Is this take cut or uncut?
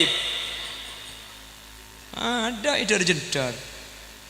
cut